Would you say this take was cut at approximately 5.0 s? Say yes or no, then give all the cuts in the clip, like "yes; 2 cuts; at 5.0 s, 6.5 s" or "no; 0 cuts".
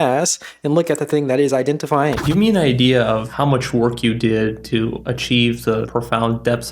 yes; 4 cuts; at 2.2 s, 3.3 s, 5.0 s, 5.9 s